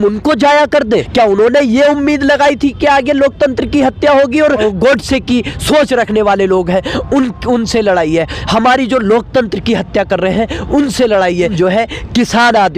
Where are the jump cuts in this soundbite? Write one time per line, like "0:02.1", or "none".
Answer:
0:01.1
0:04.6
0:11.5